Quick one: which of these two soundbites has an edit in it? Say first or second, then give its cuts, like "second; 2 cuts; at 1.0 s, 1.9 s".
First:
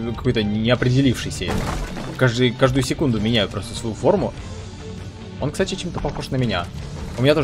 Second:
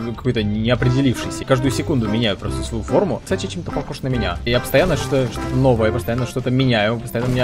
second; 3 cuts; at 1.4 s, 3.2 s, 4.5 s